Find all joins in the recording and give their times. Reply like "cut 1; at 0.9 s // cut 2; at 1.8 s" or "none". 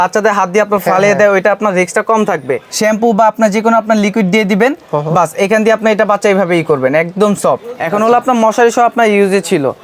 cut 1; at 2.6 s // cut 2; at 7.7 s

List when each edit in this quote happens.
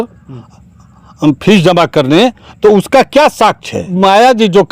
cut 1; at 3.8 s

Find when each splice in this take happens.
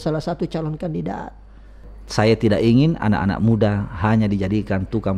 cut 1; at 1.8 s

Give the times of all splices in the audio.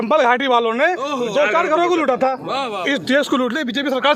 none

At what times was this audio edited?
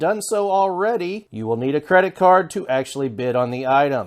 cut 1; at 1.3 s

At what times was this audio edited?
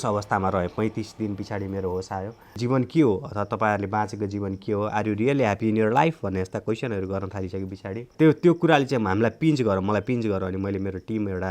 cut 1; at 2.6 s // cut 2; at 8.1 s

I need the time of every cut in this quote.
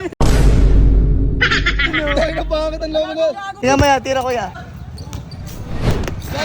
cut 1; at 3.5 s // cut 2; at 4.5 s

